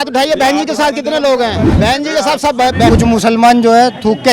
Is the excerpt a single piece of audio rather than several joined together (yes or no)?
no